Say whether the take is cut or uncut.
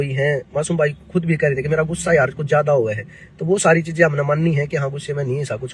uncut